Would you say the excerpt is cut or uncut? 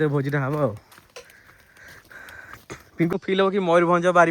cut